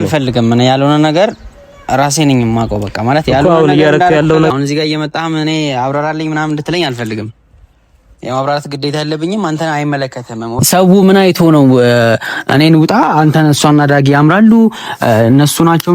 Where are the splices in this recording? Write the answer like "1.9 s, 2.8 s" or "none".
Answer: 4.5 s, 10.6 s